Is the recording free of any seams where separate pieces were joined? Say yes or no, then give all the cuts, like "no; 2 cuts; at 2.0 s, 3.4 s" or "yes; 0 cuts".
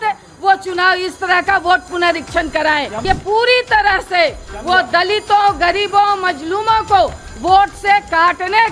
no; 1 cut; at 2.9 s